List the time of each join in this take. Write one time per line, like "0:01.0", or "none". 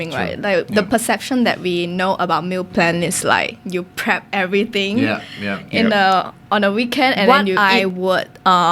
0:07.2